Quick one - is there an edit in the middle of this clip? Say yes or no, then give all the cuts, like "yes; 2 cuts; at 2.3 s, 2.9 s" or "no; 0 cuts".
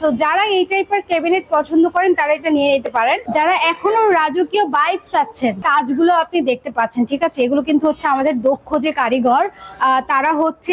yes; 2 cuts; at 3.2 s, 5.6 s